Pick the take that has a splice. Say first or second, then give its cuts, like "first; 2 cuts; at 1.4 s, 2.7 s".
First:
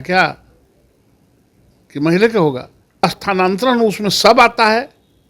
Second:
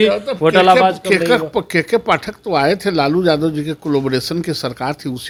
first; 1 cut; at 3.0 s